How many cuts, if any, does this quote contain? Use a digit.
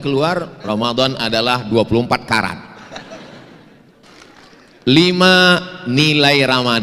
1